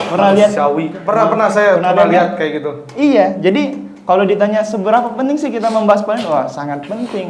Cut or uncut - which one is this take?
uncut